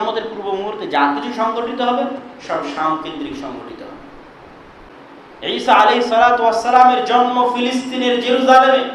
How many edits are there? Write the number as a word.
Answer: one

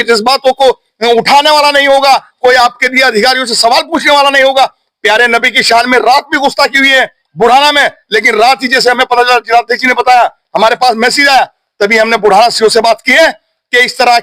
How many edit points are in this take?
zero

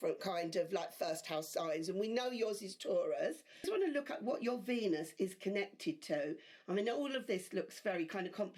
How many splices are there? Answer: one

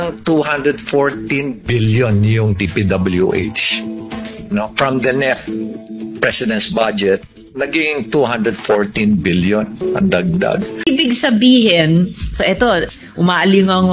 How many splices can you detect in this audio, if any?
one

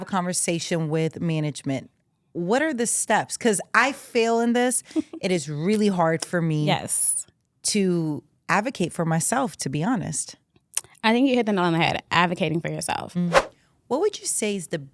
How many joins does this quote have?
one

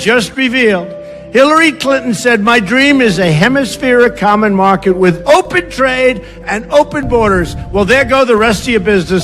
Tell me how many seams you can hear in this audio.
one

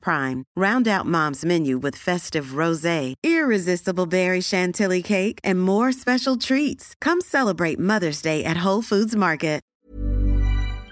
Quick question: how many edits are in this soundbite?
one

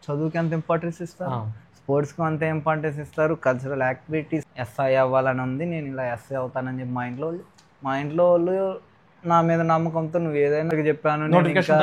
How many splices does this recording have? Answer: two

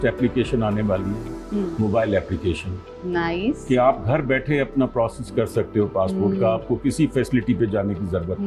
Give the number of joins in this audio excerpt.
zero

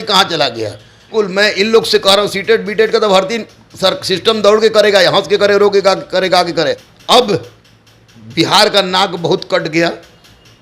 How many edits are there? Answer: two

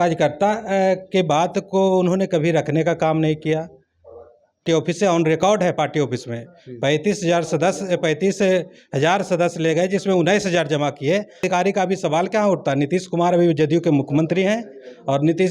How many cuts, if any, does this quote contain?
two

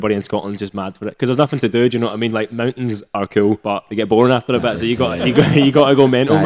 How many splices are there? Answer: zero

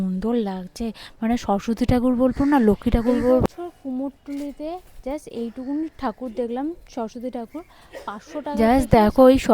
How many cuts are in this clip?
two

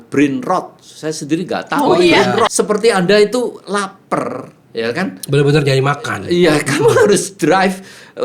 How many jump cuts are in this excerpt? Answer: one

